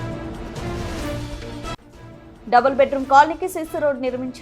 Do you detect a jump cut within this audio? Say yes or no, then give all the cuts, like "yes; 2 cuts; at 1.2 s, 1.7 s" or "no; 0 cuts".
yes; 1 cut; at 1.2 s